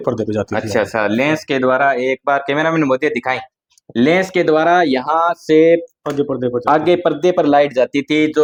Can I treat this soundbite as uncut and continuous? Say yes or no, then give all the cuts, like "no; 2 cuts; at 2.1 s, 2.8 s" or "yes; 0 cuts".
yes; 0 cuts